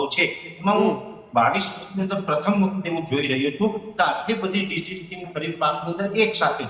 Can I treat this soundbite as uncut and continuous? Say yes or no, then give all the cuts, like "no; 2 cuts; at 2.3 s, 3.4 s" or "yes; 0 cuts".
yes; 0 cuts